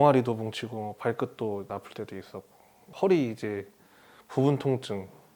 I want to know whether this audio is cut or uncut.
uncut